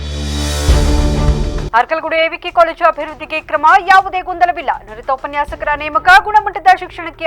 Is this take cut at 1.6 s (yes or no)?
no